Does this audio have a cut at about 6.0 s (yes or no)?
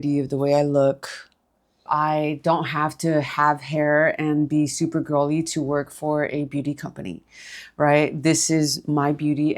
no